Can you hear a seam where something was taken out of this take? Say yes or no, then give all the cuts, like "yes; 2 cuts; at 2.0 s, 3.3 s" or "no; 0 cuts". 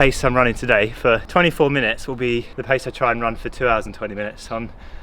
yes; 2 cuts; at 1.2 s, 2.5 s